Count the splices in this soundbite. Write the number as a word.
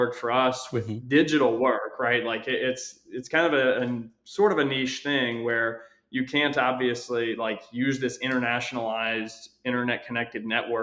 zero